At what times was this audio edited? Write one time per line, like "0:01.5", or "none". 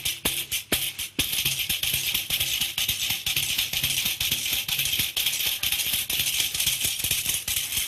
none